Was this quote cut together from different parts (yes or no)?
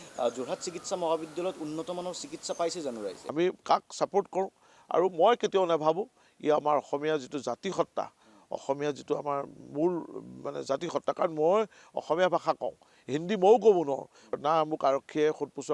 yes